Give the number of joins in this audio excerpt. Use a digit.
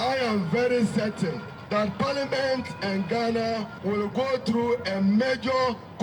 2